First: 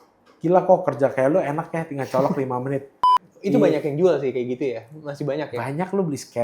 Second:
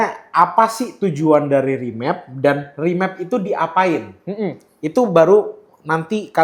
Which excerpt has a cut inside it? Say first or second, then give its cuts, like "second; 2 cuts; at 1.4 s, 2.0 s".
first; 1 cut; at 3.0 s